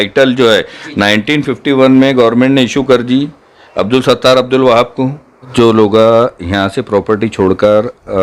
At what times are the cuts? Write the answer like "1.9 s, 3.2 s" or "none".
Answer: 5.5 s